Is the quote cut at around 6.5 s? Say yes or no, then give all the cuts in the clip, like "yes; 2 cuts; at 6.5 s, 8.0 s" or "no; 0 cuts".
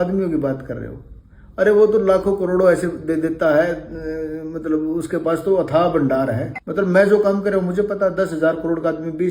yes; 1 cut; at 6.5 s